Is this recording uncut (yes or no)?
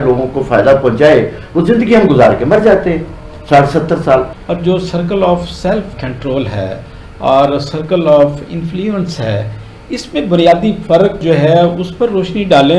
no